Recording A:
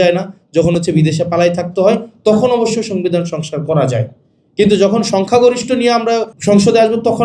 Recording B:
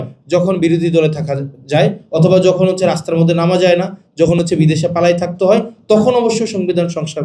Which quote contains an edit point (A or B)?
A